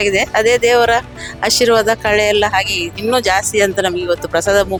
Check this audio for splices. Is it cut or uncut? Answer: uncut